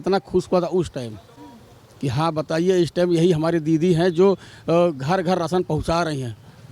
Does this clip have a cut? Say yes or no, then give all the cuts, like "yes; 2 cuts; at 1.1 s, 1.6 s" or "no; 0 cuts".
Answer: no; 0 cuts